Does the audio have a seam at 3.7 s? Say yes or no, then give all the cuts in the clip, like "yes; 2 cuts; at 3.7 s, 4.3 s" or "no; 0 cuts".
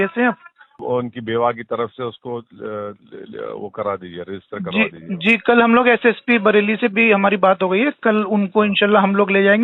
no; 0 cuts